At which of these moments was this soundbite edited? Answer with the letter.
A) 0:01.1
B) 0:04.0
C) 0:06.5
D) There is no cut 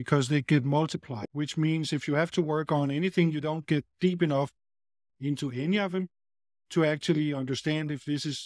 A